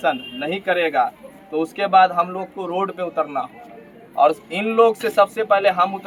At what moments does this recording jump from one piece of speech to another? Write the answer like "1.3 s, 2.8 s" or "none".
none